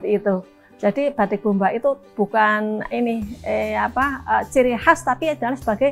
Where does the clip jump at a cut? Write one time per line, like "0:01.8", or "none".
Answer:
none